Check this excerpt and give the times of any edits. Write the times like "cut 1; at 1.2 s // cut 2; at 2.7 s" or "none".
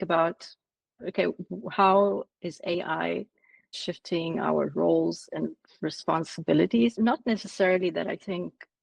cut 1; at 3.8 s